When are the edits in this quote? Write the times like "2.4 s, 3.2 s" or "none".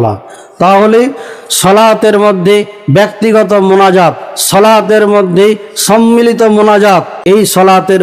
7.1 s

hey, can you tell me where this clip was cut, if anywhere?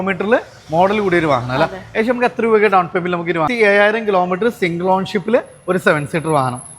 3.5 s

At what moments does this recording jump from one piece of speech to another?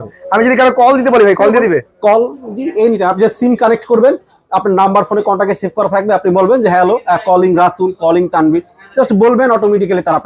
none

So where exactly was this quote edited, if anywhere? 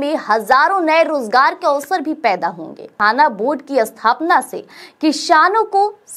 2.9 s

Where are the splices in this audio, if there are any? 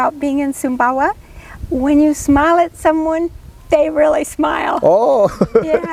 none

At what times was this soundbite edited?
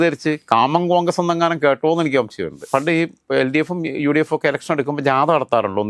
2.6 s

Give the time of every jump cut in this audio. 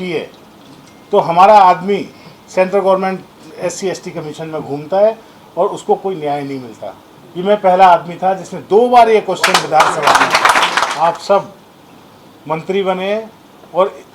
10.8 s

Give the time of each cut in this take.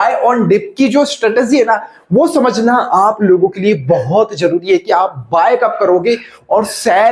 none

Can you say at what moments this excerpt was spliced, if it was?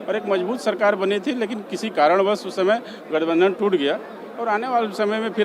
none

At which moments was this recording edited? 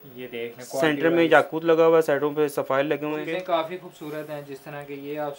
3.3 s

